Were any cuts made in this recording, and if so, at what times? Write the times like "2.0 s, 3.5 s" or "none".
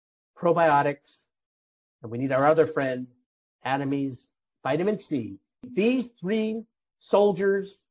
5.7 s